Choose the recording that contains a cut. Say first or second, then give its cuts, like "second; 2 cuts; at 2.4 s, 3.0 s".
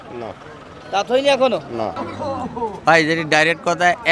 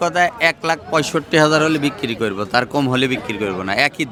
first; 1 cut; at 1.9 s